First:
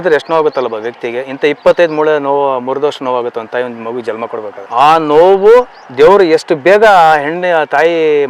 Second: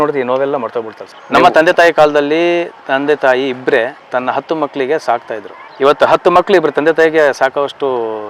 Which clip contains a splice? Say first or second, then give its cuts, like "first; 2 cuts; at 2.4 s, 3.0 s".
second; 1 cut; at 1.1 s